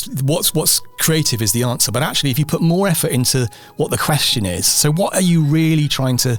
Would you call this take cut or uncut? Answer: uncut